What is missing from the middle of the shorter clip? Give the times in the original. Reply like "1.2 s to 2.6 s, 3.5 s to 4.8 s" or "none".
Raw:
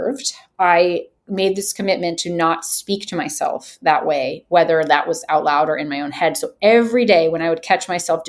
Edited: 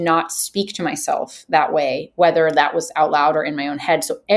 none